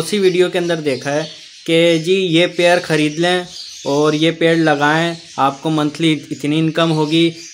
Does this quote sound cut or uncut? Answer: uncut